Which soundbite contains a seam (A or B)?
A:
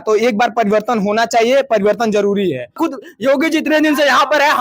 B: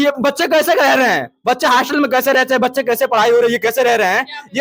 A